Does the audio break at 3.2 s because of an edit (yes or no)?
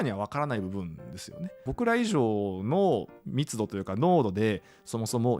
no